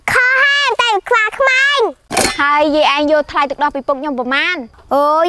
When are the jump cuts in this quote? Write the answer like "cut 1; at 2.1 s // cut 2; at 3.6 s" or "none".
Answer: cut 1; at 2.1 s